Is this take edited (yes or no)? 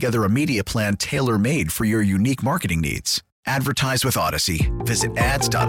no